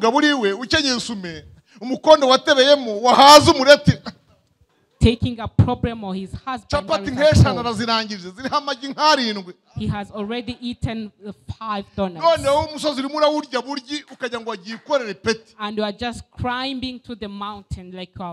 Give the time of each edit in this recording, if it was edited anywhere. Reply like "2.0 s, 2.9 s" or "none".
none